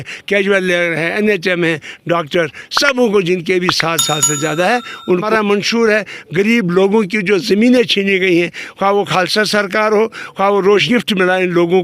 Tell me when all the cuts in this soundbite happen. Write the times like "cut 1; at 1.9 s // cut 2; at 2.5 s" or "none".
cut 1; at 5.2 s // cut 2; at 10.8 s